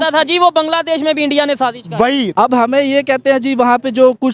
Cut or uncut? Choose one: cut